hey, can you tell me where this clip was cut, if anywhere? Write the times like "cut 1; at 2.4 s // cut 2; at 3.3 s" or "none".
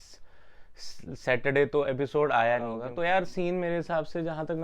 cut 1; at 2.8 s